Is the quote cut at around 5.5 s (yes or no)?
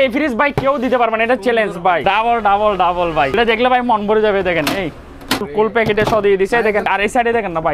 yes